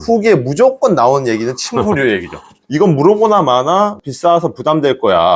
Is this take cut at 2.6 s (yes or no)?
yes